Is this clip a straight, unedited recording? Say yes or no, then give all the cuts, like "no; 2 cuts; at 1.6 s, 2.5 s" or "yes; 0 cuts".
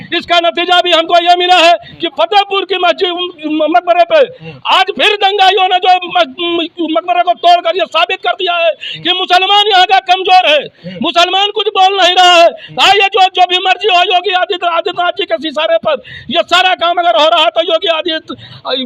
yes; 0 cuts